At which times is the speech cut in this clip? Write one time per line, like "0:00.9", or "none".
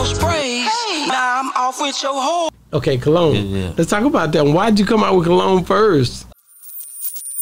0:06.3

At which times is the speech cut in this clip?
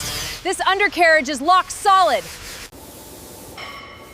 0:02.6

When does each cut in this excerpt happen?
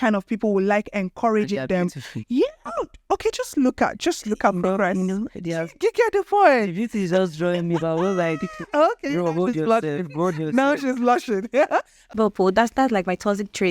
0:12.0

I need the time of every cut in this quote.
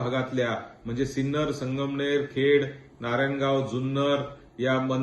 none

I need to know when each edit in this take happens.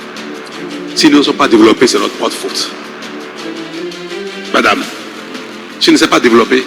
none

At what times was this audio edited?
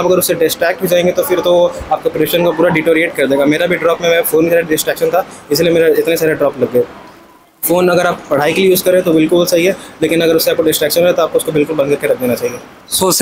none

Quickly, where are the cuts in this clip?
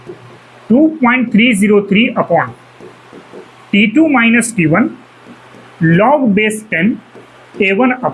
none

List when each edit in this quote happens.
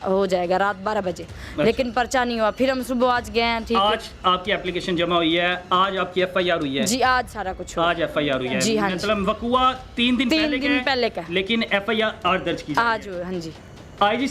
none

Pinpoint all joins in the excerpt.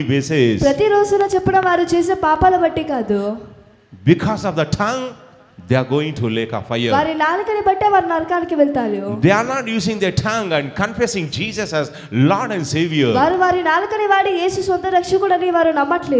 none

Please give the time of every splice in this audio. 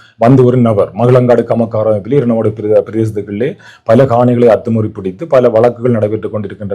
none

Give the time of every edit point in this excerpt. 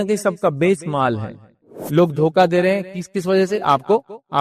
0:01.6

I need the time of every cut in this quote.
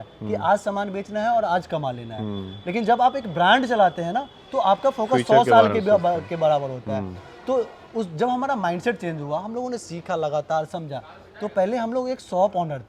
none

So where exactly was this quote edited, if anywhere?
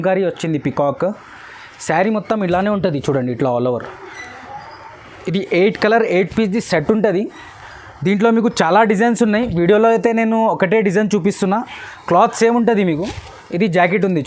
none

